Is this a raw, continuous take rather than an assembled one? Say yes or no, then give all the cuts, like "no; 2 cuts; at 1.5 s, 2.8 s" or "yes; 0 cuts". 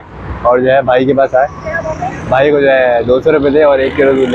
yes; 0 cuts